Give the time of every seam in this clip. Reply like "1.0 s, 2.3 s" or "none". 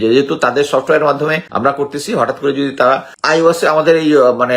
1.5 s, 3.1 s